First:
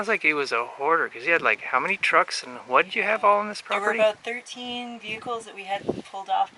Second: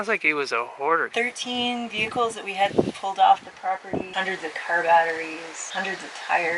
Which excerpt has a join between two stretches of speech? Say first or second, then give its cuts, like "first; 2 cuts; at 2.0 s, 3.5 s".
second; 3 cuts; at 1.1 s, 4.0 s, 5.5 s